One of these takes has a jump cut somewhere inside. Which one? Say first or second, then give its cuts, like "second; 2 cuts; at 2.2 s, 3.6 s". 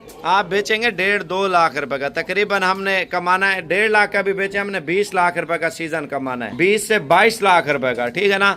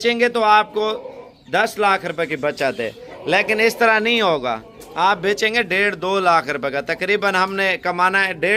first; 1 cut; at 6.5 s